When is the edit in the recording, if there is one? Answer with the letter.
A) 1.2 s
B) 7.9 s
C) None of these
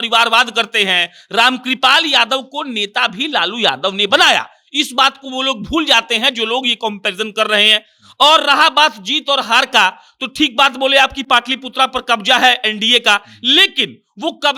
C